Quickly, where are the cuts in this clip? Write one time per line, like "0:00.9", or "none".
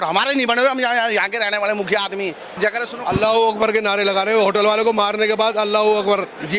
0:02.6